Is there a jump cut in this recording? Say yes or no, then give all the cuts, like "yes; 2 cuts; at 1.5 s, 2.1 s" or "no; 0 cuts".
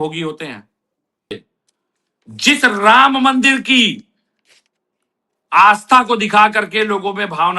yes; 1 cut; at 1.3 s